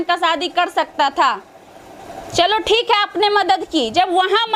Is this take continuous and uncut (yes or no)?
yes